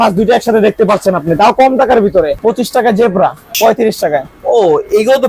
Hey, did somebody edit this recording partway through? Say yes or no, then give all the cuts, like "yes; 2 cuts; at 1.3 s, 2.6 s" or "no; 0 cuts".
yes; 2 cuts; at 2.4 s, 3.5 s